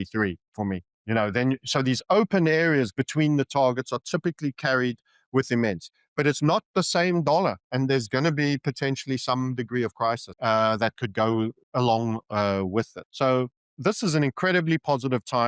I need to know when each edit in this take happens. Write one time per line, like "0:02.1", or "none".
0:00.9
0:10.3
0:11.6
0:13.0
0:13.6